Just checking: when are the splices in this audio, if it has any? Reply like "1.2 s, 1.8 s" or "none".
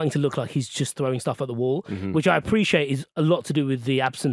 none